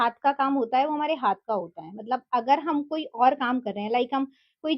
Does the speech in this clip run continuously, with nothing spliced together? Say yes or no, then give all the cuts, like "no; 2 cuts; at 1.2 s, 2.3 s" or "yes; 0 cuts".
yes; 0 cuts